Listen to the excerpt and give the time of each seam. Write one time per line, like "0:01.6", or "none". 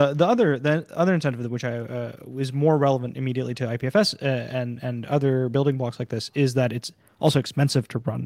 none